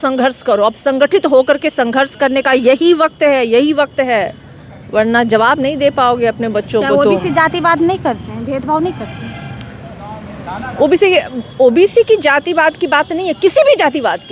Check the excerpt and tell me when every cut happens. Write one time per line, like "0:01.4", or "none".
none